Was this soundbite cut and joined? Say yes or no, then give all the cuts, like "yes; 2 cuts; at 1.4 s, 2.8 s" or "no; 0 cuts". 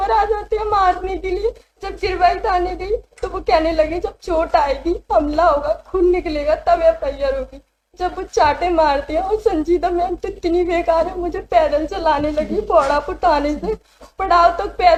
no; 0 cuts